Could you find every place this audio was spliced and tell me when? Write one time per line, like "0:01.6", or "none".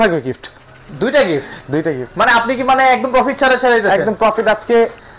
none